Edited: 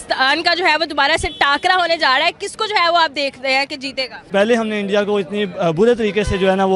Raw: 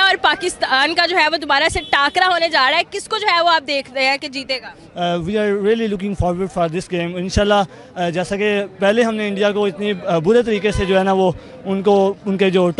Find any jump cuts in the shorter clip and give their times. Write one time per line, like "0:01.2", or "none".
0:04.2